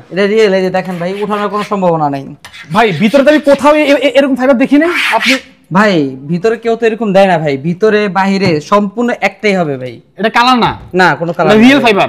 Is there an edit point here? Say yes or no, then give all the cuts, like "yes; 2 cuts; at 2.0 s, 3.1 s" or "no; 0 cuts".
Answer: no; 0 cuts